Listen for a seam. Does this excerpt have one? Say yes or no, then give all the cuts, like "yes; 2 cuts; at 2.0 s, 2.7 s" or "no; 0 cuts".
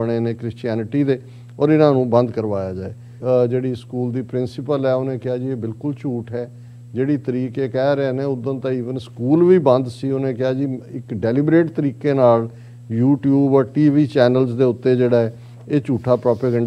yes; 1 cut; at 3.2 s